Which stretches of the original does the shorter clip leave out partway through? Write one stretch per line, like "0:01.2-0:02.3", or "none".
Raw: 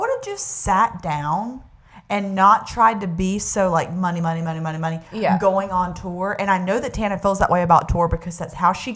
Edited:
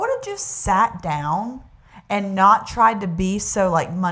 none